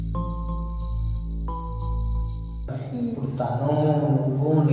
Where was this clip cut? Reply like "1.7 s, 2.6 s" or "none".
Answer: 2.7 s